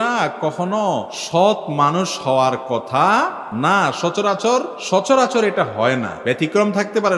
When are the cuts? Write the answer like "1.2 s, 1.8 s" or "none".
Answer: 1.2 s, 3.4 s, 4.8 s, 6.1 s